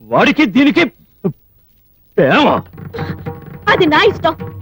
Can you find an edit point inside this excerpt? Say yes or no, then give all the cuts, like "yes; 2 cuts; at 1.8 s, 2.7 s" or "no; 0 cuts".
no; 0 cuts